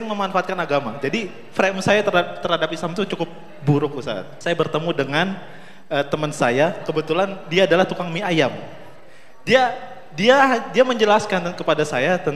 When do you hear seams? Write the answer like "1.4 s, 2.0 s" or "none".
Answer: 0.9 s, 4.3 s